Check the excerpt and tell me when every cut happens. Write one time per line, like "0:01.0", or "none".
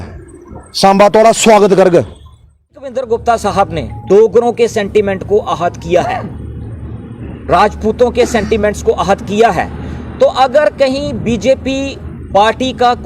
0:02.9